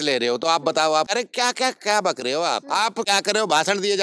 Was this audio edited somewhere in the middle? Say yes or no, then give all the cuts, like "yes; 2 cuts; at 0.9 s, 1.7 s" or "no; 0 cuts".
yes; 2 cuts; at 1.1 s, 2.9 s